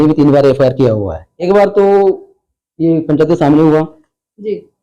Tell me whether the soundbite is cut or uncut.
cut